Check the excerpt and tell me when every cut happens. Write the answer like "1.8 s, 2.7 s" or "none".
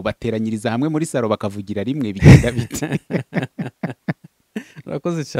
none